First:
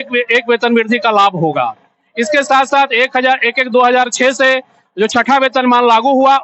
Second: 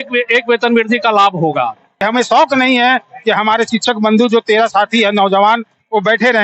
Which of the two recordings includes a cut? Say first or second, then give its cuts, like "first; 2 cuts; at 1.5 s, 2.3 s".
second; 1 cut; at 1.9 s